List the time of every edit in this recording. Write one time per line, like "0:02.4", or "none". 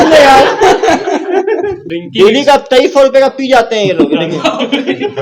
0:01.8